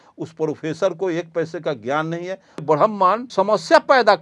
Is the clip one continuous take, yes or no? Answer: no